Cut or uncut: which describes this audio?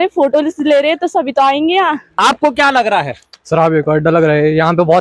cut